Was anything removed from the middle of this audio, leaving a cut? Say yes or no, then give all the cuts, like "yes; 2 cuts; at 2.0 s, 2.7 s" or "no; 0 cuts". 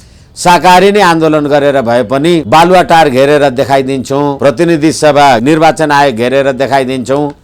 yes; 3 cuts; at 2.4 s, 4.4 s, 5.4 s